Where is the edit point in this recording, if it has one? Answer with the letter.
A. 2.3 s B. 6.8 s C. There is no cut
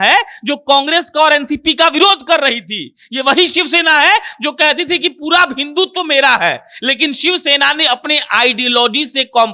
C